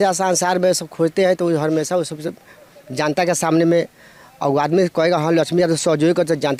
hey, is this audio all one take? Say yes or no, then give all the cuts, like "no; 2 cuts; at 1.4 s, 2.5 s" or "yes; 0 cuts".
yes; 0 cuts